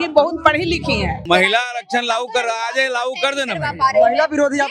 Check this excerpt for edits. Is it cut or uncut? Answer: cut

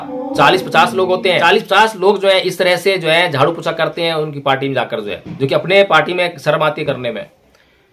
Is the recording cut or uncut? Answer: cut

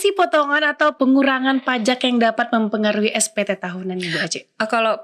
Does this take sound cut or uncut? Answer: cut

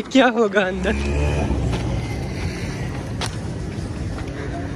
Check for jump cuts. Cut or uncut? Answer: uncut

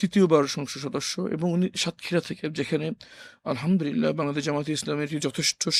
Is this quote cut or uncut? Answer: uncut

